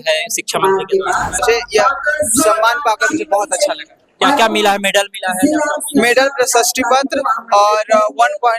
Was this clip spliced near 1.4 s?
yes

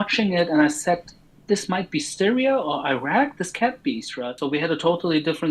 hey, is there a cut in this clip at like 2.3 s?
no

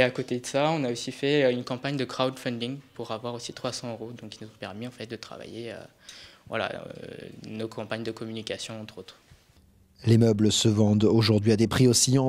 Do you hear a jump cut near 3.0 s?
no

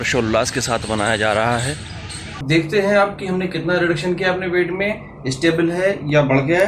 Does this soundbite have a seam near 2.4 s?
yes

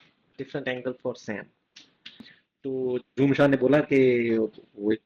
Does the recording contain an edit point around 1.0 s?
no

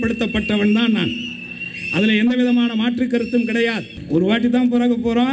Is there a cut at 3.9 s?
yes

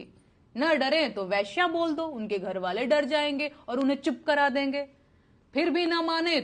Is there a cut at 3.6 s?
no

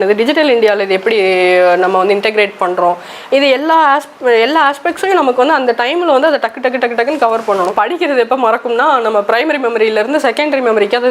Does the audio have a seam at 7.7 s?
yes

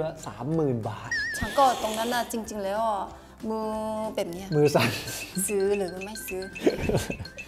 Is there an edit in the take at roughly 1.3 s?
no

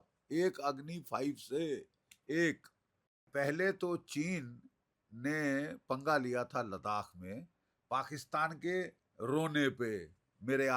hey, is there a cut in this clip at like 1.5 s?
no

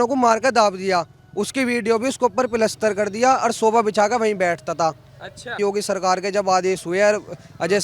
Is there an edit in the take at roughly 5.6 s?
yes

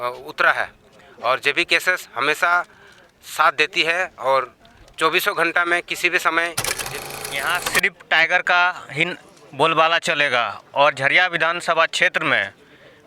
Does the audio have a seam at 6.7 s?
yes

